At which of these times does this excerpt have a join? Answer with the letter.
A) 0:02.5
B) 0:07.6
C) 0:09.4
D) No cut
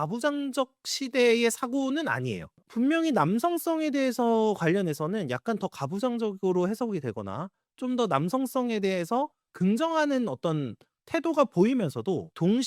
A